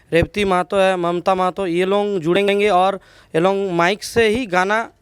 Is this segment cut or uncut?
uncut